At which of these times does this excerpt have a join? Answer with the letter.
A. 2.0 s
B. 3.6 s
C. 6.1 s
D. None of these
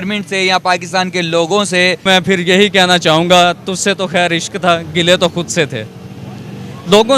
A